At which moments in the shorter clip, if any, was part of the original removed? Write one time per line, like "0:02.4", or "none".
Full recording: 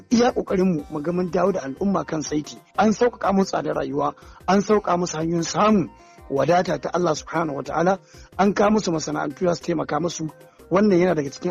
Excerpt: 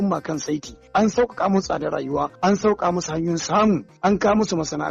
0:02.3
0:03.9